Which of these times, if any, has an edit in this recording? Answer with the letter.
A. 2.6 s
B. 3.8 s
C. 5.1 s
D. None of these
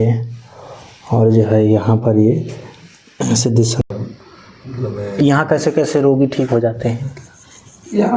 B